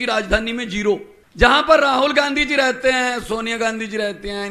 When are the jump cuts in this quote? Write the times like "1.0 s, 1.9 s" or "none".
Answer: 1.2 s